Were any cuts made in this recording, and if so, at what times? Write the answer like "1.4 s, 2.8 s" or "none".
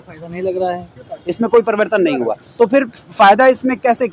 1.0 s